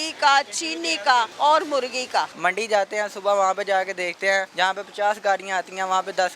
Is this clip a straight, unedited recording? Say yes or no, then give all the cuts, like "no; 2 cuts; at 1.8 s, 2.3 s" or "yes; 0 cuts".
no; 3 cuts; at 1.3 s, 2.3 s, 4.5 s